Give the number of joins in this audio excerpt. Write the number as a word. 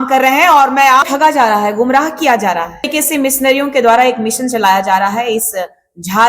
two